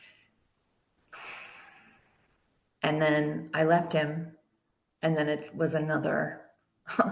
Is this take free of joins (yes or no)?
yes